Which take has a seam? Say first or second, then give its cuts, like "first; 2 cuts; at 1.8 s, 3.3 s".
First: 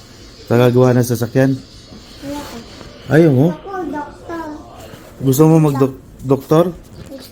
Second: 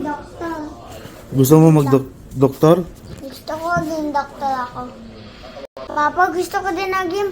second; 1 cut; at 5.7 s